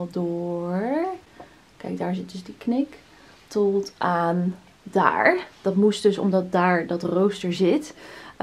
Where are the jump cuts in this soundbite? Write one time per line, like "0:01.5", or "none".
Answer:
none